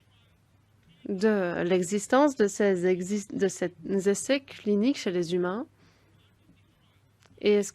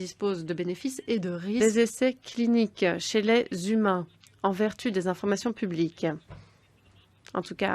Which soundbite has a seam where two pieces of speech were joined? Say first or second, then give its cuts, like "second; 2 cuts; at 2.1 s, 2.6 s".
second; 1 cut; at 1.6 s